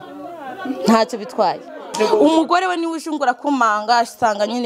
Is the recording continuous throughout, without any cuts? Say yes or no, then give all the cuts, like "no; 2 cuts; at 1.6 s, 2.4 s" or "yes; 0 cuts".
no; 1 cut; at 1.9 s